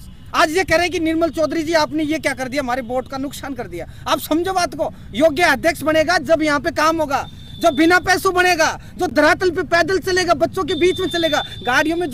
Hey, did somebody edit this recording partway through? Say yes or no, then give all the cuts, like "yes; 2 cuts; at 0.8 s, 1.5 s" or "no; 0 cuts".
no; 0 cuts